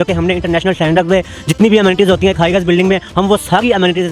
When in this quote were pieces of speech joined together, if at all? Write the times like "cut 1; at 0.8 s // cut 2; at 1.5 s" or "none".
none